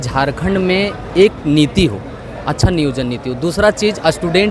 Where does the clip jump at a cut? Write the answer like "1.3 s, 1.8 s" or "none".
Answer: none